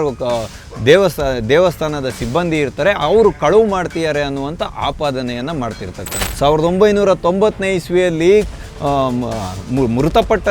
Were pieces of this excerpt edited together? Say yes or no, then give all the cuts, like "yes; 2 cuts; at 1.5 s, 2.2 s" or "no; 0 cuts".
yes; 1 cut; at 6.2 s